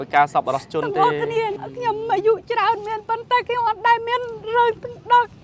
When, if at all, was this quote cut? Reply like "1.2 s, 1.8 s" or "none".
1.5 s